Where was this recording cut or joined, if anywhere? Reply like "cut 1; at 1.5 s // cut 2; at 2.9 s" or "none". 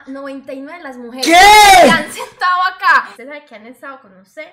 cut 1; at 3.1 s